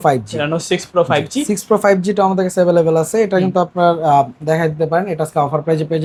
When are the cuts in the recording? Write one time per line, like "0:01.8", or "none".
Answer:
none